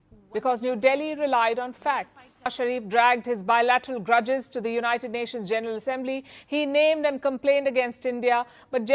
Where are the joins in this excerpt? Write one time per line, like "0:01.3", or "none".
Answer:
0:02.5

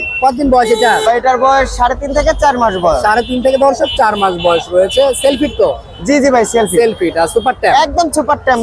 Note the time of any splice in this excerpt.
none

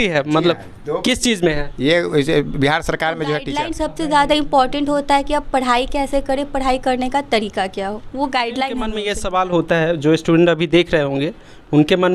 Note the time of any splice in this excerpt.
0:03.6
0:09.0

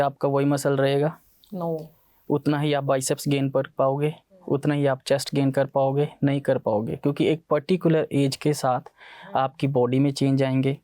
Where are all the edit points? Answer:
none

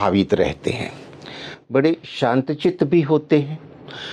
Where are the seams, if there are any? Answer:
none

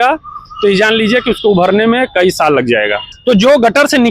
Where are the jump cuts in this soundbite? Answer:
0:03.1

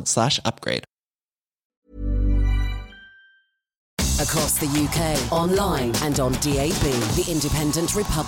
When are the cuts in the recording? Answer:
0:03.9

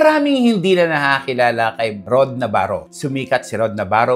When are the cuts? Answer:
none

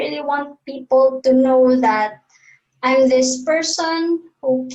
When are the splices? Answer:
none

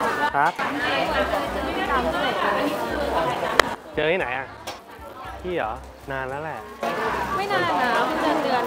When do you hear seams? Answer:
none

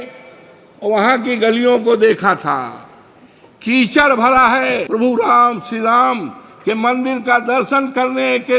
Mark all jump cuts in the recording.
0:04.8

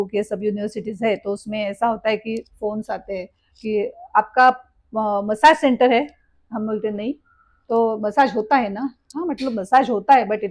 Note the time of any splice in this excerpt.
none

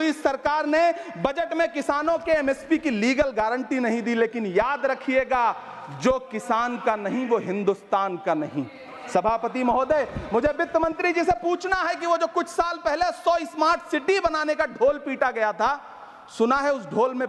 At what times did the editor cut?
none

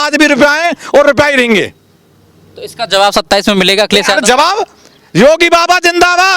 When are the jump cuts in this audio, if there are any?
none

